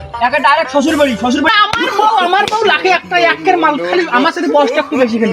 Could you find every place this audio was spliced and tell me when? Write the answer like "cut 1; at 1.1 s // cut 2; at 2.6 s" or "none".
cut 1; at 1.5 s